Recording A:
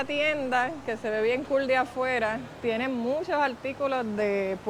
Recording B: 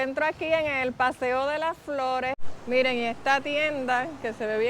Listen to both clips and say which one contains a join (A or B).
B